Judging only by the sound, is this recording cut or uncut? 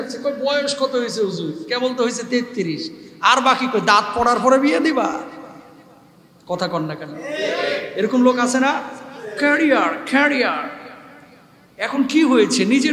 uncut